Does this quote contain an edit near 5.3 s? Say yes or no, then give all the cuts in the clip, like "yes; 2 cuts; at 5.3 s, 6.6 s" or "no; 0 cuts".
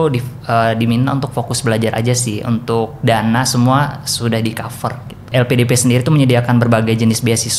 yes; 1 cut; at 5.3 s